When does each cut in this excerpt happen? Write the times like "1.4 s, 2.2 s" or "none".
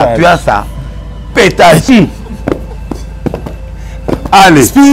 1.8 s